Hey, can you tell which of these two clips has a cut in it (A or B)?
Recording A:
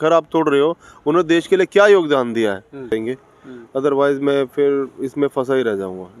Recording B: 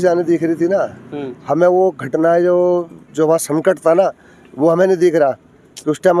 A